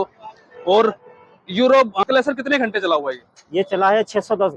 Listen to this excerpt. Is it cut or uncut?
cut